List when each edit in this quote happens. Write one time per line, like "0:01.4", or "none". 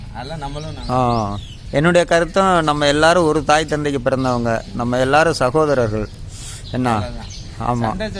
none